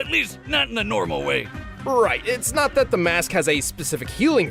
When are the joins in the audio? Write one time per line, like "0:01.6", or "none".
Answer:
none